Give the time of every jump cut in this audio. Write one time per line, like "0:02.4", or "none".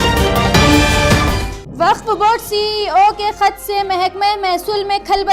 0:01.4